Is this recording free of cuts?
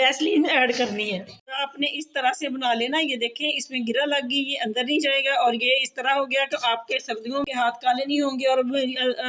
no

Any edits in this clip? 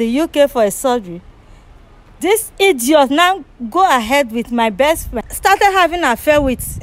yes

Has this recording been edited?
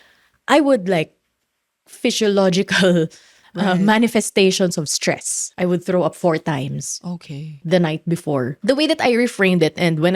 yes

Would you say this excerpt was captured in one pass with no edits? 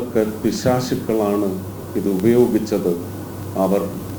yes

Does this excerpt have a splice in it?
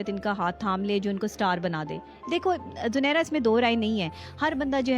no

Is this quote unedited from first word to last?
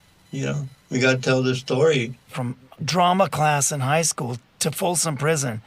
no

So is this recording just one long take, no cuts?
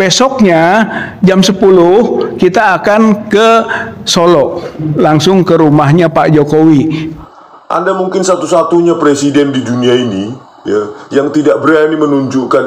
no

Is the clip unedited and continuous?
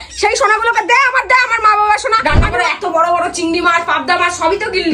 no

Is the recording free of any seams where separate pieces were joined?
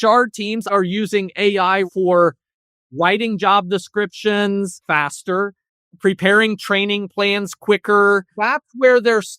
no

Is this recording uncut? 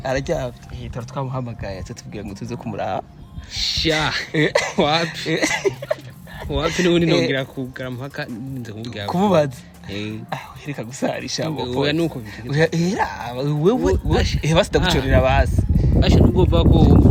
yes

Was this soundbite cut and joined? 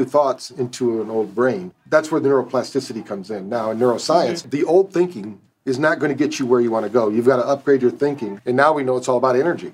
yes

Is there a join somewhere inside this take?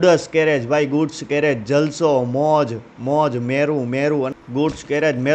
yes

